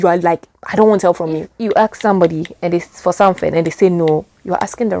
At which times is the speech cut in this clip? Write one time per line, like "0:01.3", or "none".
0:01.5